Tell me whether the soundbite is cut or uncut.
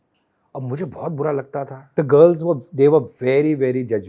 cut